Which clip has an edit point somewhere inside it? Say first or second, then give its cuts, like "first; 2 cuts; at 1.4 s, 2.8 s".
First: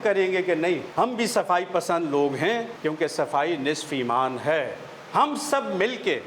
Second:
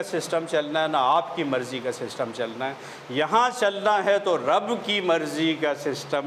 first; 3 cuts; at 0.9 s, 2.7 s, 4.9 s